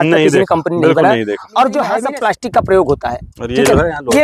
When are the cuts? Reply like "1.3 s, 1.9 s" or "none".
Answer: 2.0 s